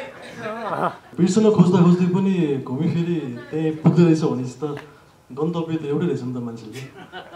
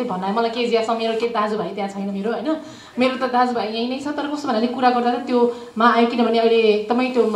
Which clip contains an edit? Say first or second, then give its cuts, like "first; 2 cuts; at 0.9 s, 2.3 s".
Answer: first; 1 cut; at 1.1 s